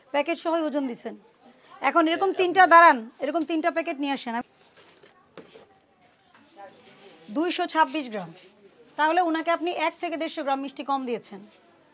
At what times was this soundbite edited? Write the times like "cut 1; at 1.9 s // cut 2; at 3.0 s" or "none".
cut 1; at 4.4 s